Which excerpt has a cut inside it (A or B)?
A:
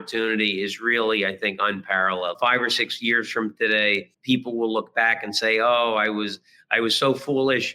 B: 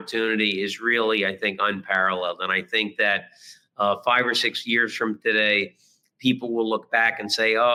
A